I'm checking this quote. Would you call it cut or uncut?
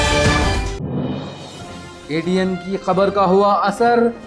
cut